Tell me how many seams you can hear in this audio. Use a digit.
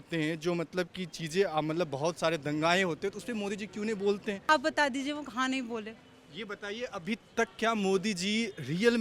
1